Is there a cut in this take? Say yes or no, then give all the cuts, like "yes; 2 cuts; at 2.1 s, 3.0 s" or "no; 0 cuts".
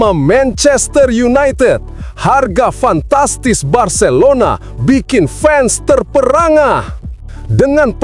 no; 0 cuts